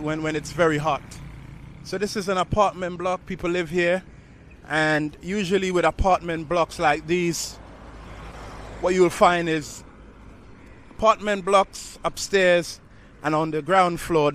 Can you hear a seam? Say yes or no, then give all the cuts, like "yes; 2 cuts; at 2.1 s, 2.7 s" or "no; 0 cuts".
no; 0 cuts